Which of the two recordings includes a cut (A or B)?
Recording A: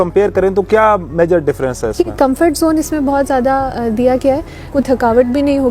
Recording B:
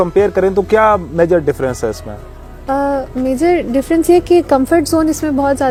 A